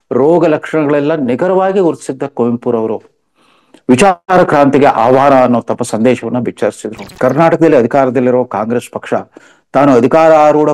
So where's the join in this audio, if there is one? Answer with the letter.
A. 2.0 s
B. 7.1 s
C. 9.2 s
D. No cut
B